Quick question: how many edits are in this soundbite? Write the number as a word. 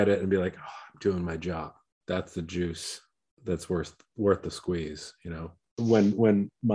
two